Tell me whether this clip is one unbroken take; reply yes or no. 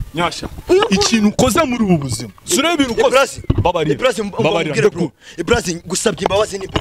yes